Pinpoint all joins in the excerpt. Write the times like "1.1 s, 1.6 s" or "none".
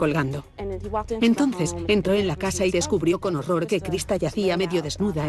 2.8 s